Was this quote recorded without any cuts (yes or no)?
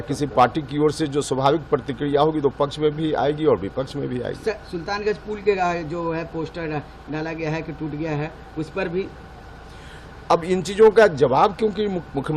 yes